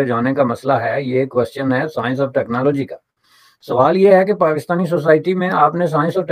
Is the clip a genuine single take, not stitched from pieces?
yes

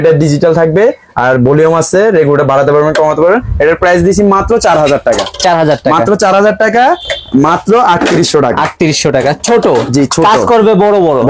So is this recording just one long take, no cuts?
yes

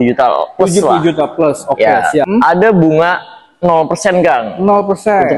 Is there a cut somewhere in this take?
yes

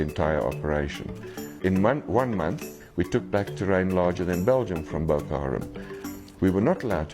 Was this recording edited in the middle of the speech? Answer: yes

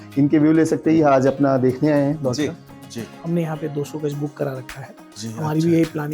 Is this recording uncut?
no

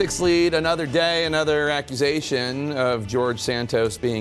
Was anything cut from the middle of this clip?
no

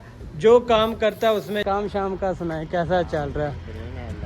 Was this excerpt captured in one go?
no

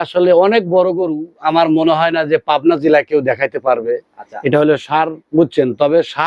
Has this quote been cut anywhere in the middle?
no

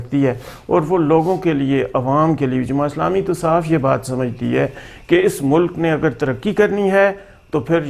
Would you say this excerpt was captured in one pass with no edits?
yes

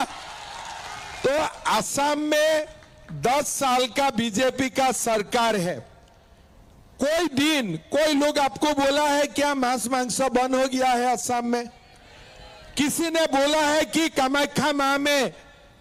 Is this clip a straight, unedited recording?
yes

